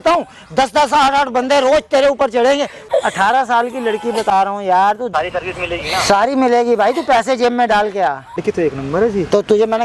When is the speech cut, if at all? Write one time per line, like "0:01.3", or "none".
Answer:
0:02.8
0:05.1
0:08.4